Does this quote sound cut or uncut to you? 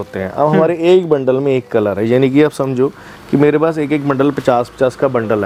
uncut